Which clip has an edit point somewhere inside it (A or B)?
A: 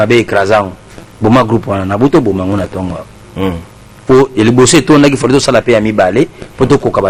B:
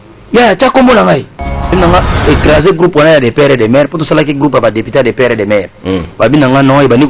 B